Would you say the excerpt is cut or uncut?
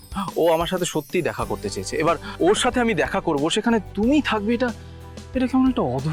uncut